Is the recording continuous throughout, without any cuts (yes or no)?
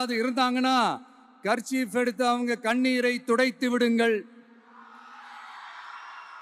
yes